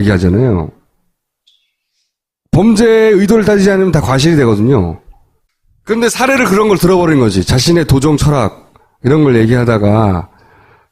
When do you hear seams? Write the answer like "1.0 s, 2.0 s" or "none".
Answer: 1.1 s